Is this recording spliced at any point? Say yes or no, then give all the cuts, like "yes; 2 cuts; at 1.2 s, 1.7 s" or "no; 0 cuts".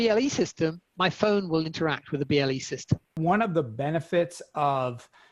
yes; 1 cut; at 3.1 s